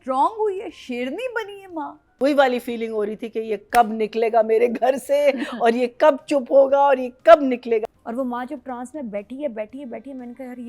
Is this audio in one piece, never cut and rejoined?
no; 2 cuts; at 2.0 s, 7.8 s

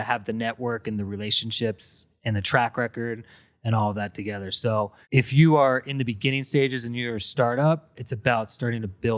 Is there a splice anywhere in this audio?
yes; 1 cut; at 5.0 s

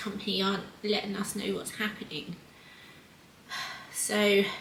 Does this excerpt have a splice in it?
no; 0 cuts

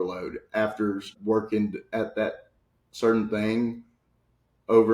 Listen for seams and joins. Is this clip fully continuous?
no; 1 cut; at 1.1 s

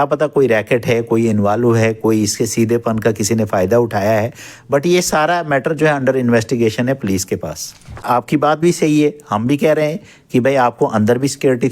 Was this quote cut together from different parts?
yes; 1 cut; at 8.0 s

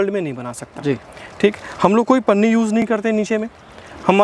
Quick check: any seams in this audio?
no; 0 cuts

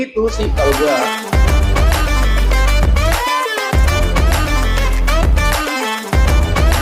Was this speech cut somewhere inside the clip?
yes; 1 cut; at 1.0 s

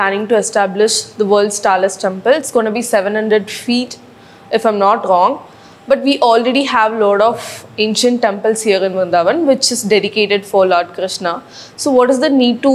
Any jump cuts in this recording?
no; 0 cuts

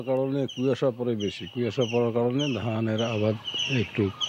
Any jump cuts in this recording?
no; 0 cuts

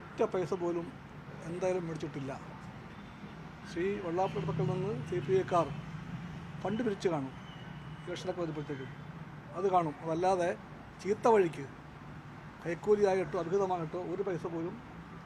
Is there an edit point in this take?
no; 0 cuts

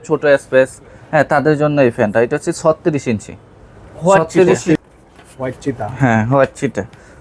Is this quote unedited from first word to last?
no; 1 cut; at 4.8 s

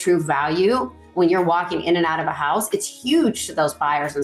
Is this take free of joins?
yes; 0 cuts

